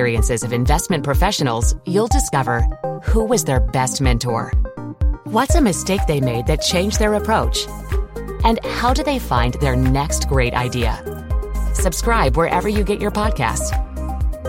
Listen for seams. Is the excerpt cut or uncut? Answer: uncut